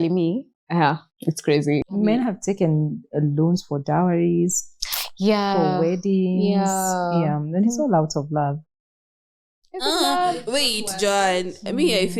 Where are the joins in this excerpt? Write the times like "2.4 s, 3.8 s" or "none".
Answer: 1.9 s

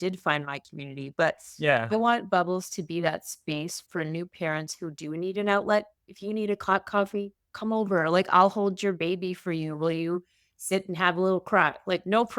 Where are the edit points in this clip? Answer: none

